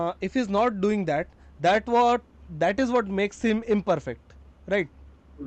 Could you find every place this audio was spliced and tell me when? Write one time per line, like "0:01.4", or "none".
none